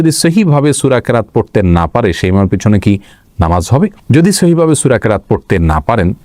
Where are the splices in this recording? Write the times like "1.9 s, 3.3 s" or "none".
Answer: none